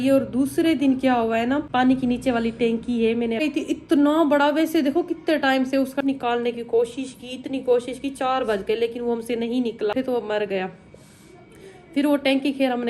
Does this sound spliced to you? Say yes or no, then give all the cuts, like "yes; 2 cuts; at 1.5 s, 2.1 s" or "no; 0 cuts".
yes; 4 cuts; at 1.7 s, 3.4 s, 6.0 s, 9.9 s